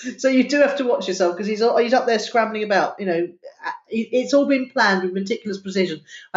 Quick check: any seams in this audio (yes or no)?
no